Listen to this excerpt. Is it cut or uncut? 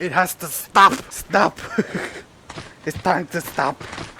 cut